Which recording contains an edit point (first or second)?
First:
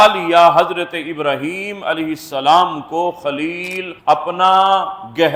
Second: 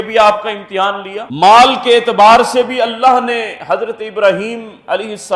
second